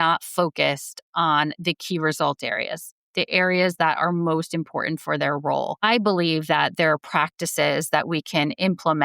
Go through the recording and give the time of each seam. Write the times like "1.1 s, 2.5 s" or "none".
5.8 s